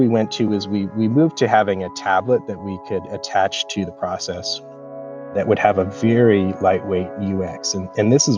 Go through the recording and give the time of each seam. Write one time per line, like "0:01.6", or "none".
none